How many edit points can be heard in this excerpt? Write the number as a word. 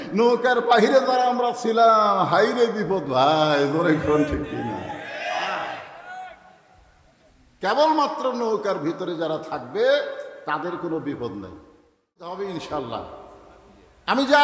one